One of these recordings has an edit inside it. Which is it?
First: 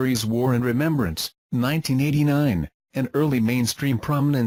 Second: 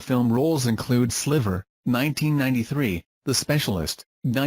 second; 1 cut; at 1.6 s

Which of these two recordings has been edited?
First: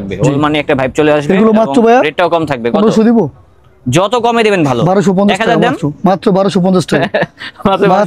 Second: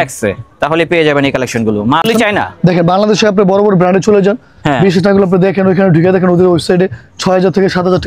second; 1 cut; at 2.0 s

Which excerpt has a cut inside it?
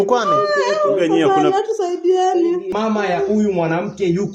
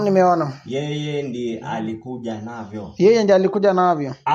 first; 1 cut; at 2.7 s

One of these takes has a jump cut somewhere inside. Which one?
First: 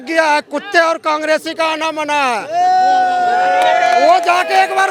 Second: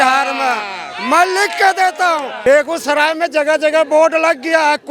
second; 1 cut; at 2.3 s

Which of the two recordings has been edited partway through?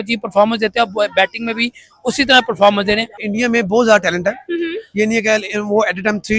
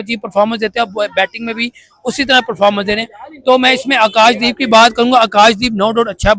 first; 1 cut; at 3.2 s

